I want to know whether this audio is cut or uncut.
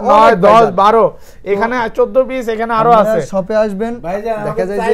uncut